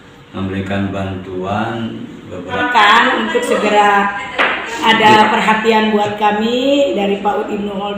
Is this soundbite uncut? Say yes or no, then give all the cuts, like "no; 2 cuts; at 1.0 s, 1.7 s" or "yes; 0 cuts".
no; 1 cut; at 2.6 s